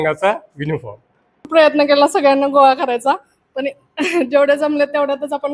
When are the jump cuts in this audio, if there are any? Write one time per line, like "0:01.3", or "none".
0:01.4